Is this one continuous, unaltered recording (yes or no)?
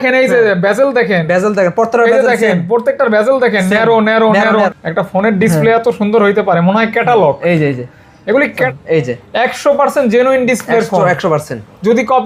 no